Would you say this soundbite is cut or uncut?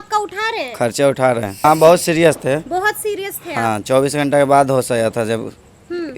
cut